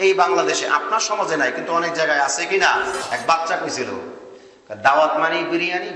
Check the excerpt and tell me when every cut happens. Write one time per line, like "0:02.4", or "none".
0:03.0